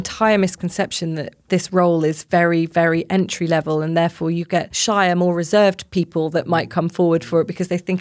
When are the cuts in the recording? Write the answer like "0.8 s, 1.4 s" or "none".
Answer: 1.5 s, 4.7 s